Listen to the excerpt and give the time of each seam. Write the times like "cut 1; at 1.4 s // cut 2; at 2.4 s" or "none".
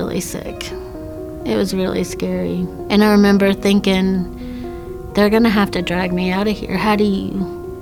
none